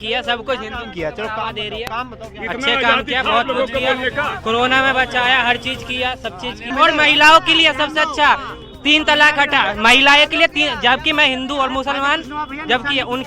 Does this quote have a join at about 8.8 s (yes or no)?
no